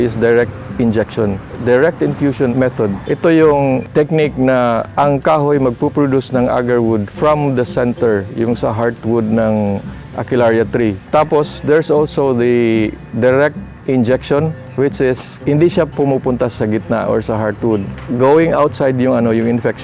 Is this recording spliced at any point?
yes; 2 cuts; at 11.0 s, 17.9 s

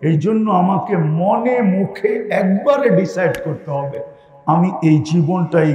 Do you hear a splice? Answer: no; 0 cuts

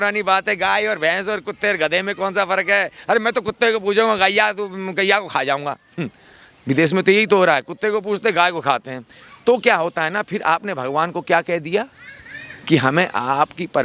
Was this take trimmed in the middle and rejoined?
no; 0 cuts

